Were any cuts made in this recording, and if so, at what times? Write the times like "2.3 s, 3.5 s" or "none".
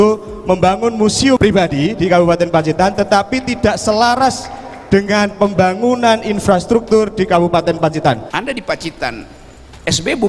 1.4 s, 8.3 s